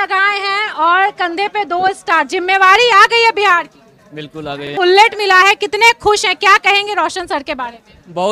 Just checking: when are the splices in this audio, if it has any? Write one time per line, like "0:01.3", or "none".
0:04.7